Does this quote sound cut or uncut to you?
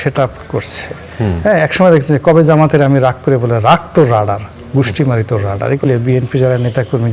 cut